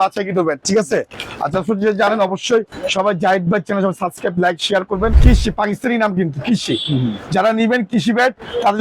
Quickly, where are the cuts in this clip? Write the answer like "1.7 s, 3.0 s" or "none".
5.2 s